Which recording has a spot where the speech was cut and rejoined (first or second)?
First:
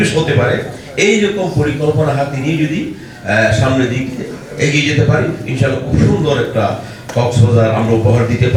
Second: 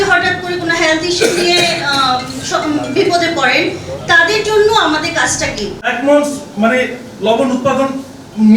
second